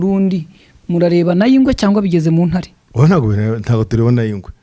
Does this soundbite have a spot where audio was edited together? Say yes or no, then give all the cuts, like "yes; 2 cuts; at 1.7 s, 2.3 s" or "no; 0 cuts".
no; 0 cuts